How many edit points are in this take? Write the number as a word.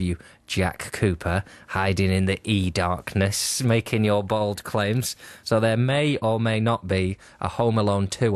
one